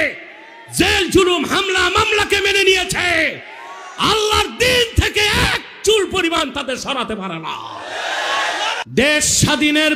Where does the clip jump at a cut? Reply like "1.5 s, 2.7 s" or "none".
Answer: 8.8 s